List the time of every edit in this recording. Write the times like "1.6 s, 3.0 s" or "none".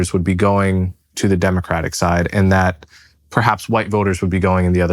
1.1 s